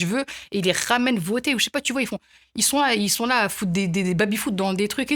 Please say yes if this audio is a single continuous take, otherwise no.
yes